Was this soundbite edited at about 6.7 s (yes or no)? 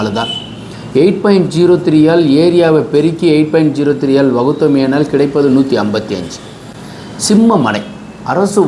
no